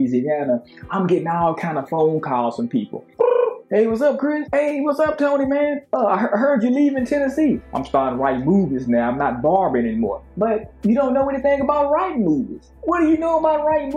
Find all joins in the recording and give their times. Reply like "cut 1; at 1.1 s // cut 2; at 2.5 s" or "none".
cut 1; at 3.1 s // cut 2; at 7.7 s